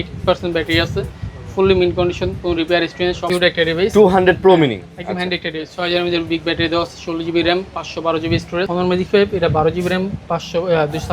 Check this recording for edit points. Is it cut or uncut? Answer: cut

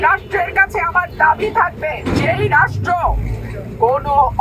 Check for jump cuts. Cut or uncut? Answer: cut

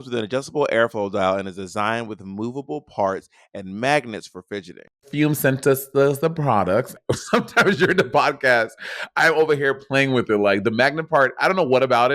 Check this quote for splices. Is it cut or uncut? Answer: cut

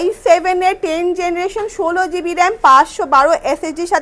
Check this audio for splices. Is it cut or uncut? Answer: uncut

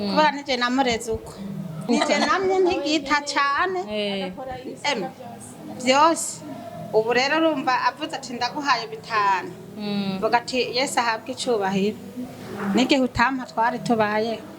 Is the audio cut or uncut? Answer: cut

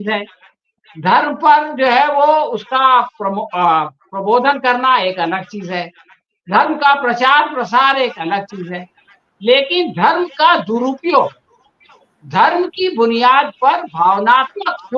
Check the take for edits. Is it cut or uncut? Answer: uncut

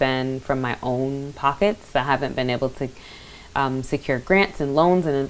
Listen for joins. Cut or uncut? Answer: uncut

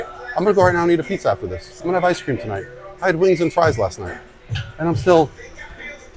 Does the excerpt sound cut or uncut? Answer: cut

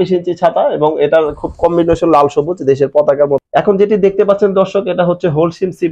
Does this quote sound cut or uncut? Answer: cut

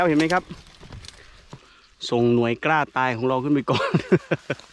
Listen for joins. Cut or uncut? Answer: cut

